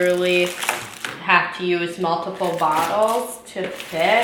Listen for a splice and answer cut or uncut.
uncut